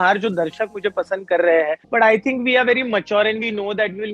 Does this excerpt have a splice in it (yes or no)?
yes